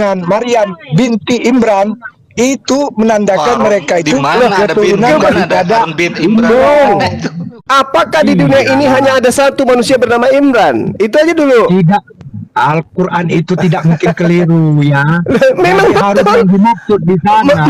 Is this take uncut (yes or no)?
no